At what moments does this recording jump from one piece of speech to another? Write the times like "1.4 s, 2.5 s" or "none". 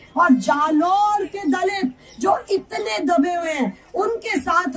none